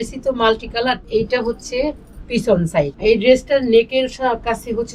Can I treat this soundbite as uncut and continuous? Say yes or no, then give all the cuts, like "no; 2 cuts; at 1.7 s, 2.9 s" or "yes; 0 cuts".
no; 2 cuts; at 1.0 s, 2.9 s